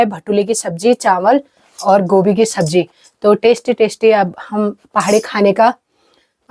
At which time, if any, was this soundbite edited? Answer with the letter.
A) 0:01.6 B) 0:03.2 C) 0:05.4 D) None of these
D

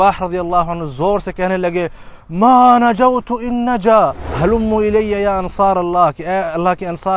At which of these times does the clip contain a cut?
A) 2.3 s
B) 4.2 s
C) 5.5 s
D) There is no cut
B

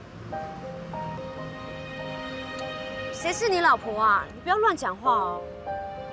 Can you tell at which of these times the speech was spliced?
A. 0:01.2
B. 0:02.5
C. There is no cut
A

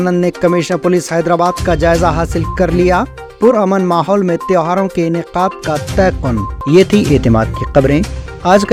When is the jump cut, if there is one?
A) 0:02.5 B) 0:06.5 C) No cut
C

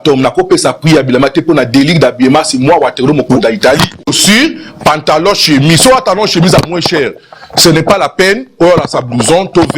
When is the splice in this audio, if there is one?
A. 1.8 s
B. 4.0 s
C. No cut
B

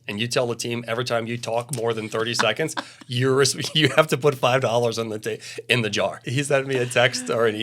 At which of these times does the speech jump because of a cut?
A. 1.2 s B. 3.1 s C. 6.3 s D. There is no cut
C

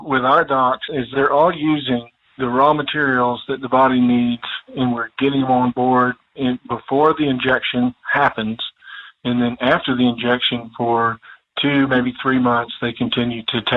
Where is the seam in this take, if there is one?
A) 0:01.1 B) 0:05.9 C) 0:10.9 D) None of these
A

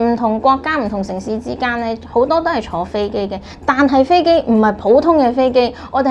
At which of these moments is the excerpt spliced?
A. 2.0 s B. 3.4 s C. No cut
C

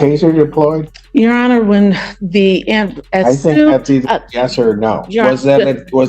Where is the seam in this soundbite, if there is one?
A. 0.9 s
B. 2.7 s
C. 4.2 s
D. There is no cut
A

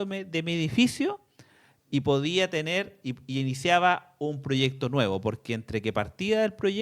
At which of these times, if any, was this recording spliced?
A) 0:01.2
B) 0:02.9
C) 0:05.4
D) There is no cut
D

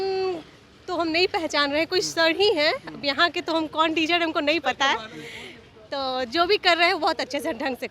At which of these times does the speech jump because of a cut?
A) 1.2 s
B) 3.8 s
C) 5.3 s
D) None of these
D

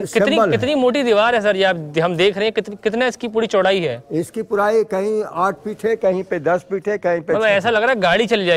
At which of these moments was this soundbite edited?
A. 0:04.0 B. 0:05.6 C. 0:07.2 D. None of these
D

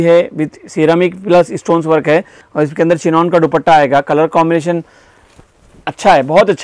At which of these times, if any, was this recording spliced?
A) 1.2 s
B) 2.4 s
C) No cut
B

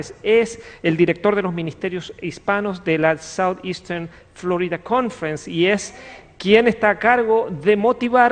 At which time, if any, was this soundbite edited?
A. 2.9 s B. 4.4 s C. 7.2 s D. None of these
A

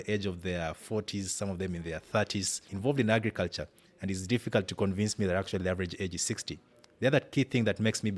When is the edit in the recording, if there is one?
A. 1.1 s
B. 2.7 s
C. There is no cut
B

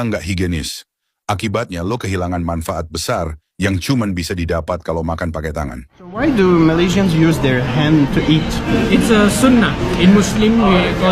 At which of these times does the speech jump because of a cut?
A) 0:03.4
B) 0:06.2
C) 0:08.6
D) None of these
B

